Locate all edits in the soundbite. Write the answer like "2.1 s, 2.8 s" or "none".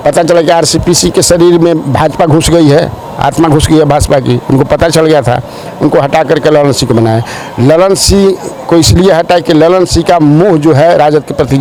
none

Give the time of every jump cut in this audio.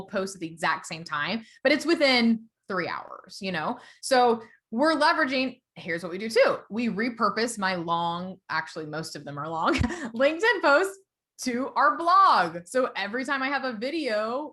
none

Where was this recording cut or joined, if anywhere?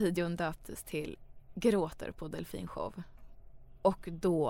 none

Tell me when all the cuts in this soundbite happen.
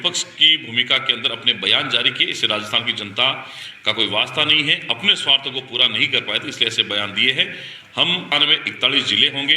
8.3 s

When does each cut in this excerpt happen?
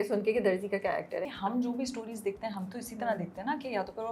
1.3 s

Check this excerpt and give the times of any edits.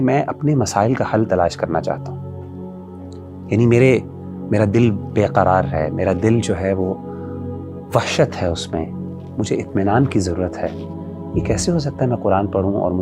none

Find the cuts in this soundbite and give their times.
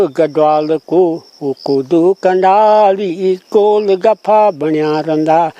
none

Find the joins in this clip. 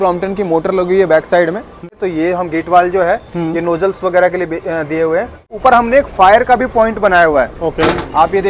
1.9 s, 5.5 s

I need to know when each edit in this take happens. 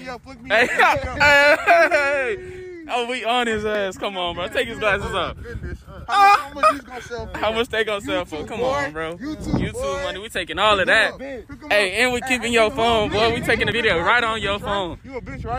11.2 s

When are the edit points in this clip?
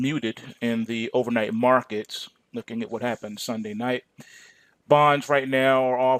2.9 s

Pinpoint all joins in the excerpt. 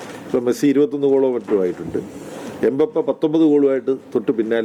none

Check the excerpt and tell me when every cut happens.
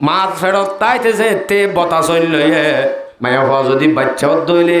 3.1 s

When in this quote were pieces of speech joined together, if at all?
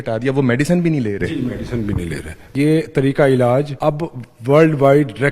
2.5 s, 3.7 s

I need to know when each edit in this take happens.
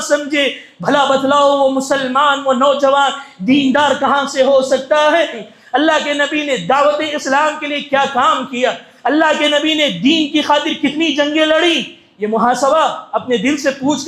5.4 s

